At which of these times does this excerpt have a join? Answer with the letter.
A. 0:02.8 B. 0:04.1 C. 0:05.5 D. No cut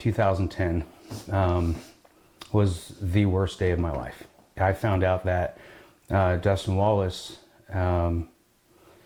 D